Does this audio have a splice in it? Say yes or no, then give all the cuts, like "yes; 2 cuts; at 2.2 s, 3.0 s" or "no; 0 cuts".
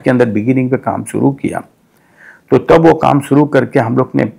no; 0 cuts